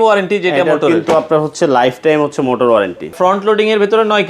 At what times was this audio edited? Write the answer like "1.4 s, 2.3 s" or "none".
3.1 s